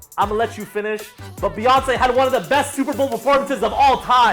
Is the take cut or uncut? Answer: uncut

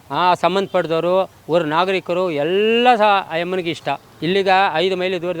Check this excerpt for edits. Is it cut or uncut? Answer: cut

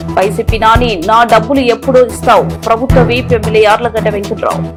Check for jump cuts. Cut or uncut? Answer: uncut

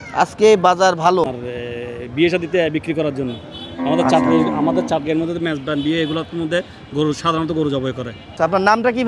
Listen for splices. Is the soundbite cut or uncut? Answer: cut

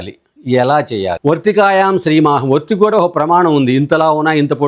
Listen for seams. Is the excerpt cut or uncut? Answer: cut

